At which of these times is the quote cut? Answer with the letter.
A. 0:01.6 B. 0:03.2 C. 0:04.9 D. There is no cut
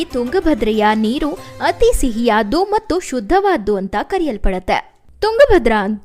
D